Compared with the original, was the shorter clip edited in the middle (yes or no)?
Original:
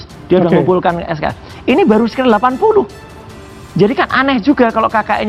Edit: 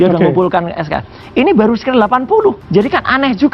yes